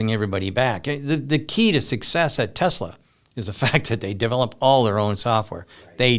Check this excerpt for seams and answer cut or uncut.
uncut